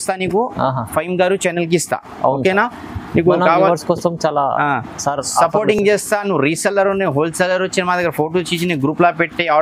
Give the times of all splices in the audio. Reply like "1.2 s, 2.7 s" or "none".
none